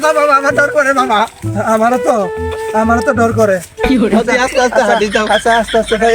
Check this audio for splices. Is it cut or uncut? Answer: uncut